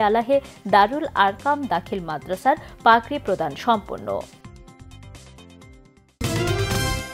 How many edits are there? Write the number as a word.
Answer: one